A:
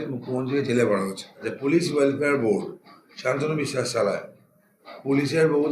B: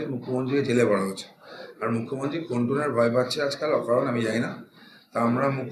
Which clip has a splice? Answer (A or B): A